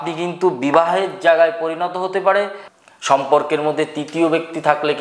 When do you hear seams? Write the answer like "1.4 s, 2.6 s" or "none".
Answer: 2.6 s